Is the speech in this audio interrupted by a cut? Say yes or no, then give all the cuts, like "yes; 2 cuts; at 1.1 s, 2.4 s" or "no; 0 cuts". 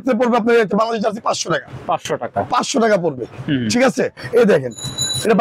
no; 0 cuts